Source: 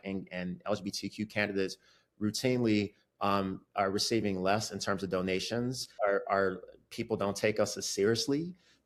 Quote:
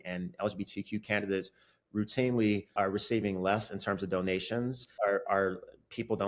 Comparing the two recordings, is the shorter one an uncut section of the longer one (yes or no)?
no